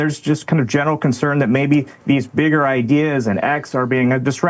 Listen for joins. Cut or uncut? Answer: uncut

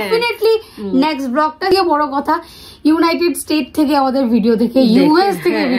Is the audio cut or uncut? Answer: cut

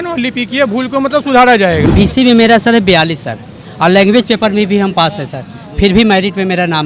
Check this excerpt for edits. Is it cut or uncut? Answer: cut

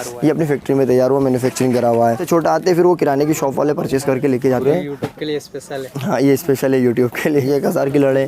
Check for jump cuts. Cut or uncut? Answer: cut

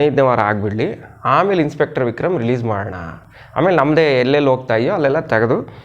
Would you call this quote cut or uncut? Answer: uncut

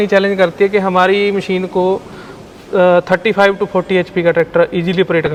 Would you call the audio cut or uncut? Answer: uncut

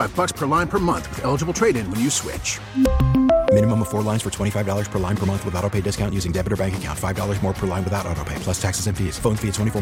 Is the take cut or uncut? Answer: uncut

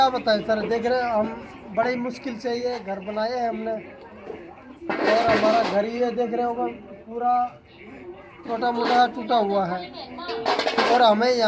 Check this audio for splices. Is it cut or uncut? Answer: uncut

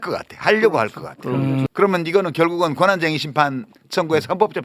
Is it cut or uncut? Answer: cut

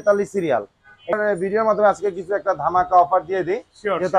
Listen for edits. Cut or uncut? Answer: cut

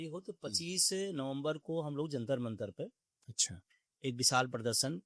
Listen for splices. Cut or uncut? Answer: uncut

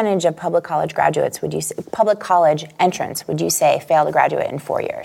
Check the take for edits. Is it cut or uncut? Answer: uncut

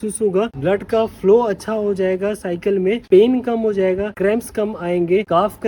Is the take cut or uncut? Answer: uncut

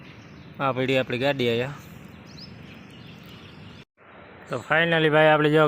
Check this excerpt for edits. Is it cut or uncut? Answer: cut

